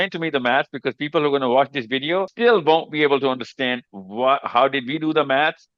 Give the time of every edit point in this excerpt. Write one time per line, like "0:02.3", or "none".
0:02.3